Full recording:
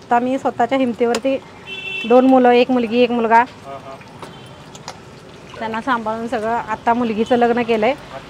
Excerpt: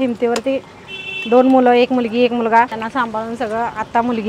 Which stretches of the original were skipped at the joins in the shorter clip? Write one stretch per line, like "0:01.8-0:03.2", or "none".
0:03.5-0:05.7